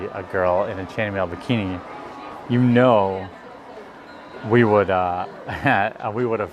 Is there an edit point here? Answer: no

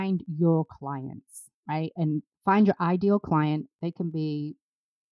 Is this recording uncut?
yes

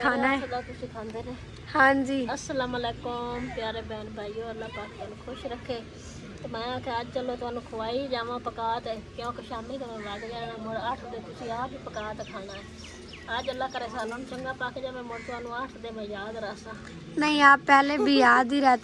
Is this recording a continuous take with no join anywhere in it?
yes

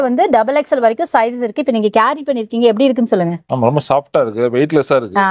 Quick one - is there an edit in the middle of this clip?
no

